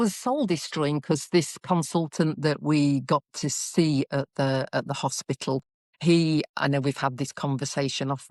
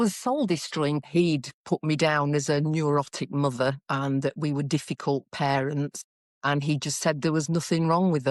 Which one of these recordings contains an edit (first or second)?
second